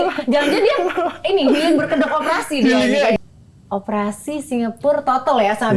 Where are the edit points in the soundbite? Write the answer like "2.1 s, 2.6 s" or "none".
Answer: 3.2 s